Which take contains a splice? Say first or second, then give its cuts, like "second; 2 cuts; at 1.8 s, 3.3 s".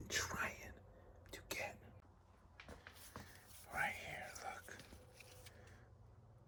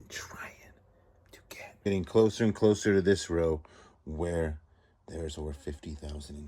second; 1 cut; at 1.9 s